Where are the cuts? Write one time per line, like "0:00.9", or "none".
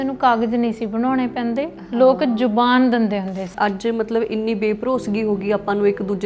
0:03.5